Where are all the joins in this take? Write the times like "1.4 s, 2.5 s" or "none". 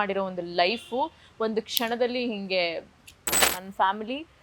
3.4 s